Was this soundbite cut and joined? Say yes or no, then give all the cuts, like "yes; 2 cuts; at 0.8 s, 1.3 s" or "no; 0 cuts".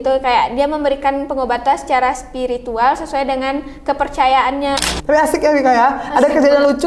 yes; 1 cut; at 4.8 s